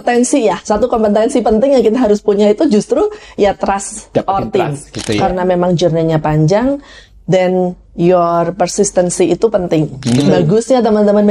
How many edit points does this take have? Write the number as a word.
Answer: two